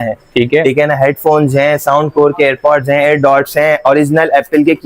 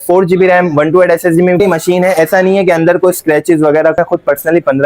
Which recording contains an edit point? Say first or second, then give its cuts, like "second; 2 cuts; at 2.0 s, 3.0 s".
second; 2 cuts; at 1.6 s, 4.0 s